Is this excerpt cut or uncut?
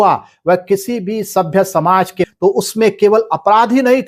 cut